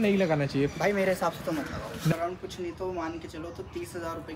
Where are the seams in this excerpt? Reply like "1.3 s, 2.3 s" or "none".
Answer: 2.1 s

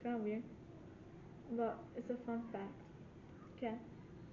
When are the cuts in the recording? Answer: 3.3 s

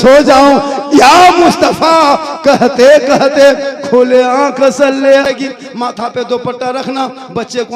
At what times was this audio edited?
5.2 s

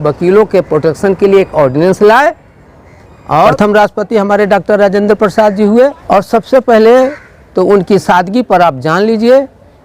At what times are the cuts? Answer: 3.5 s, 6.0 s

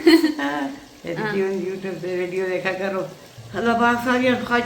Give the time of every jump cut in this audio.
3.2 s

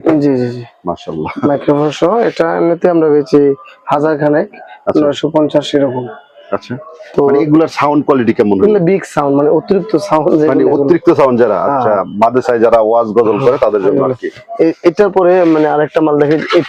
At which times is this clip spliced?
none

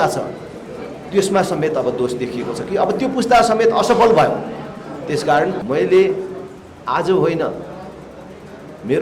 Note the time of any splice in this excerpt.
5.6 s

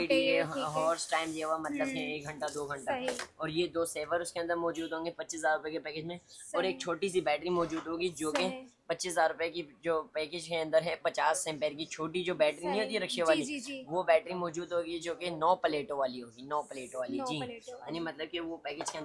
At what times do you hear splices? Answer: none

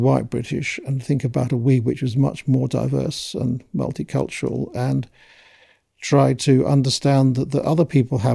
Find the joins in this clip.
none

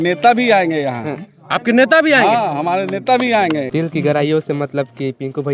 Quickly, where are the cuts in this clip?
3.7 s

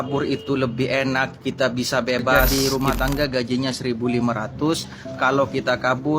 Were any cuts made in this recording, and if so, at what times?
2.4 s

